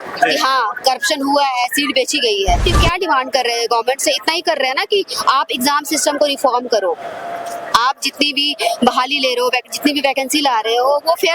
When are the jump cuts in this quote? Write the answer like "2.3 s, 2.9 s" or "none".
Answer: 2.6 s